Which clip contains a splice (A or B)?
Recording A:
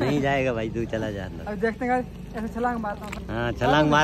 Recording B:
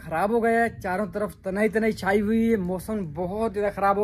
A